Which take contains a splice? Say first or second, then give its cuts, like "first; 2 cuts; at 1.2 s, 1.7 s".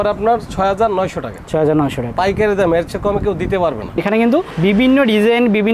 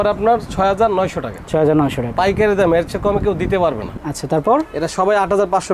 first; 1 cut; at 4.0 s